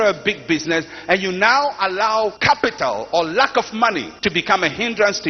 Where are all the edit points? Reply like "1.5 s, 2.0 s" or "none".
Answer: 2.4 s, 4.1 s